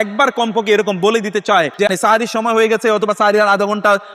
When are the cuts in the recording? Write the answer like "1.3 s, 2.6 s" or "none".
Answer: 1.8 s